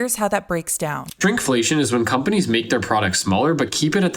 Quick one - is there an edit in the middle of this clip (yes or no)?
yes